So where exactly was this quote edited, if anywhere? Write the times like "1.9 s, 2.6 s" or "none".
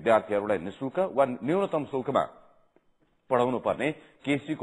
2.3 s